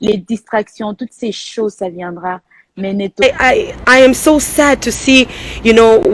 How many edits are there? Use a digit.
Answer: 1